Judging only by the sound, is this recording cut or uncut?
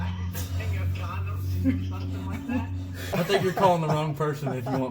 cut